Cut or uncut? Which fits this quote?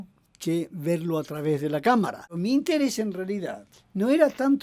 cut